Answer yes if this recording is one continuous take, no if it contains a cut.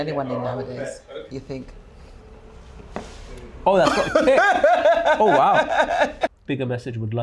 no